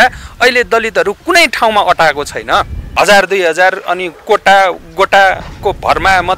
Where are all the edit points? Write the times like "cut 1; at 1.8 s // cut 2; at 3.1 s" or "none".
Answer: cut 1; at 2.9 s